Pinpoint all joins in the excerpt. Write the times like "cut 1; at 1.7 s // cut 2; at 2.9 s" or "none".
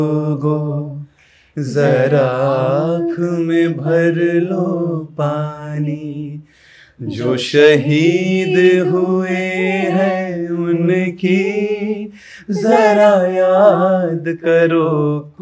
none